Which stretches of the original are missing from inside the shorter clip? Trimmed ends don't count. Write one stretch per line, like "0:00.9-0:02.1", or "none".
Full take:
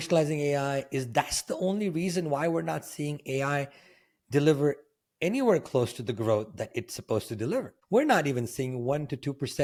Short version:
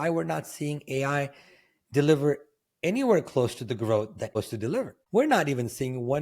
0:06.7-0:07.1